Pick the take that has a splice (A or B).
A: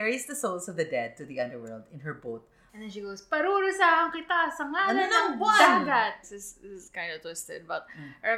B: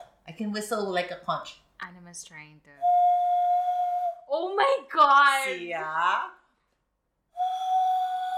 A